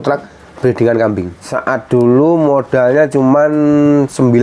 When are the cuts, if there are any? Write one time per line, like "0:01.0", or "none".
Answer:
0:01.6